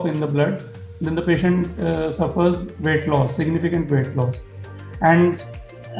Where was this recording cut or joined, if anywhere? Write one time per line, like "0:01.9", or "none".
none